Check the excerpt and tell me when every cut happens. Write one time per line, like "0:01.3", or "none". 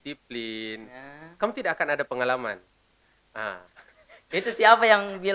none

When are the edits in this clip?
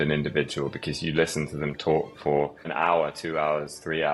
0:02.6

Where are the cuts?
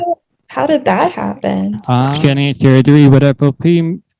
0:02.1

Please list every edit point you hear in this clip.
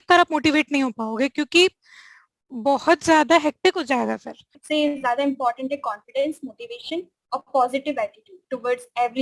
0:04.6

